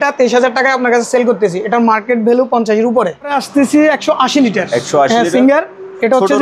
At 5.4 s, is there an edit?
no; 1 cut; at 3.4 s

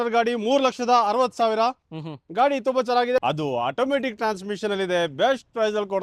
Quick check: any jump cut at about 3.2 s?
yes; 1 cut; at 3.2 s

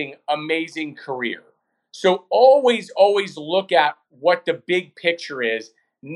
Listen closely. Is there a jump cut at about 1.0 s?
no; 0 cuts

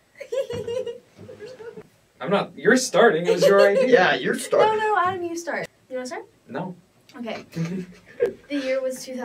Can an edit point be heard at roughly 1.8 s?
yes; 2 cuts; at 1.8 s, 5.6 s

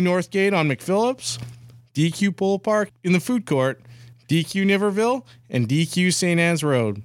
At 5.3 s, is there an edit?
no; 1 cut; at 2.9 s

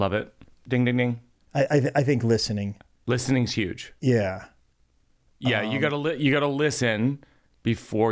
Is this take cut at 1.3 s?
yes; 1 cut; at 1.3 s

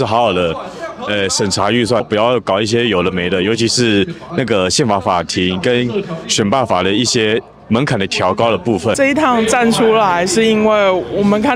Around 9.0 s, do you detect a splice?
yes; 2 cuts; at 2.0 s, 9.0 s

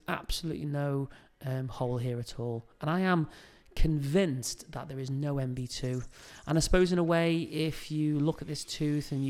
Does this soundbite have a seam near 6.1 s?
no; 0 cuts

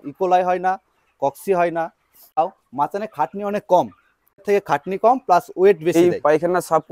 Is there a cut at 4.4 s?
yes; 3 cuts; at 2.4 s, 4.4 s, 5.9 s

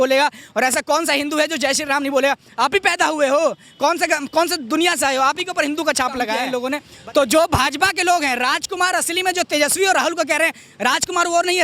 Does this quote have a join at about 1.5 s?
no; 1 cut; at 6.5 s

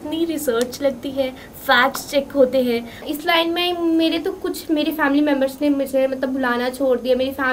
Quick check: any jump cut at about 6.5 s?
no; 1 cut; at 3.1 s

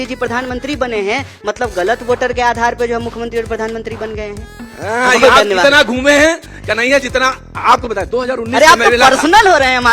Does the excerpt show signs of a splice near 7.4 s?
no; 1 cut; at 4.6 s

